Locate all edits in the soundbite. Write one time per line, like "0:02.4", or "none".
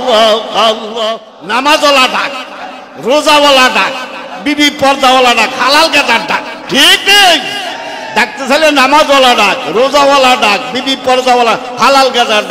0:01.2